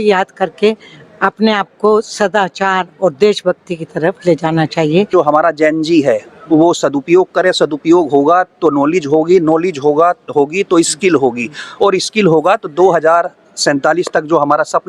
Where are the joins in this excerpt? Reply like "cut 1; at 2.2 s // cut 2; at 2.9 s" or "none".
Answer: cut 1; at 5.1 s